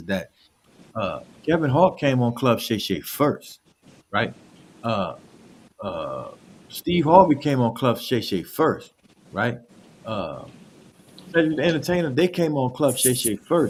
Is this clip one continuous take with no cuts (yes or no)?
yes